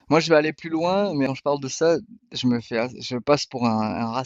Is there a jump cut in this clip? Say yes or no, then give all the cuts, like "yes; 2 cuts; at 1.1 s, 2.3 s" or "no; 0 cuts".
yes; 1 cut; at 1.3 s